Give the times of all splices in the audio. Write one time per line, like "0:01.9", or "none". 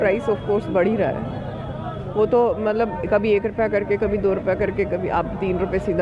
none